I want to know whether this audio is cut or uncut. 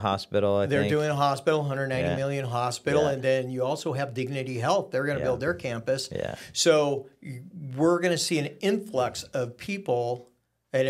uncut